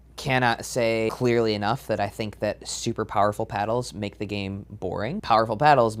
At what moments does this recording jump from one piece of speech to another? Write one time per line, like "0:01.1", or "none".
0:01.1
0:05.2